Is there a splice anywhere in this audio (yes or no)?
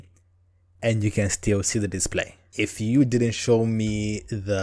yes